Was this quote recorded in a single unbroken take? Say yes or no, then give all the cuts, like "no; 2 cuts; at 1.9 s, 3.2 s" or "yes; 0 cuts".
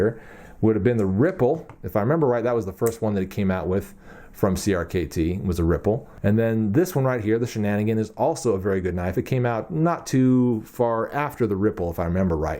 no; 1 cut; at 6.1 s